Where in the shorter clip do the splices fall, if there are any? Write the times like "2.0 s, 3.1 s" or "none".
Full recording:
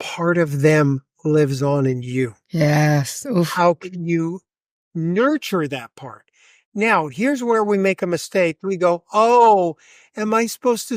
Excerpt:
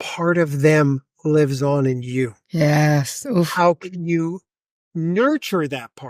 none